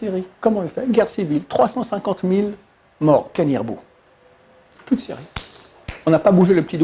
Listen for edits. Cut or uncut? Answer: uncut